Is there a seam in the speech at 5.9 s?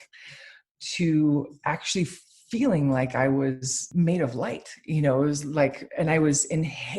no; 1 cut; at 3.9 s

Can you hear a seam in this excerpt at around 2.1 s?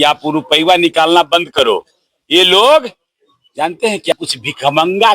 no; 1 cut; at 4.1 s

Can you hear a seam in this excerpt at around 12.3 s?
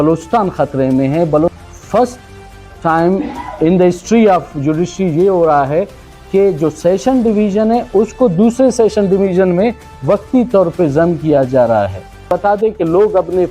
yes; 2 cuts; at 1.6 s, 12.3 s

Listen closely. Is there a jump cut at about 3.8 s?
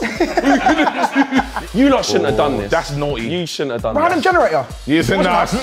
no; 1 cut; at 1.5 s

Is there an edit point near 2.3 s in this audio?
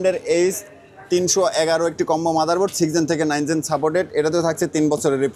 no; 0 cuts

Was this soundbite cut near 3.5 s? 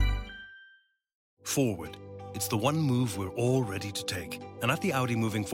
no; 1 cut; at 1.3 s

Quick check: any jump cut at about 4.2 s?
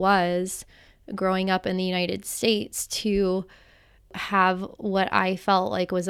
yes; 1 cut; at 4.2 s

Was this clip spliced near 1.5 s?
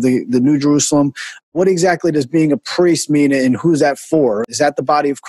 yes; 2 cuts; at 1.5 s, 4.4 s

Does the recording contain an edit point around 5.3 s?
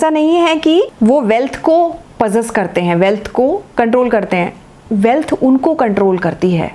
no; 2 cuts; at 0.9 s, 3.7 s

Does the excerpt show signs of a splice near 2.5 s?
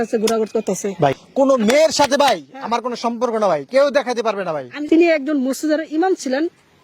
no; 2 cuts; at 1.2 s, 4.7 s

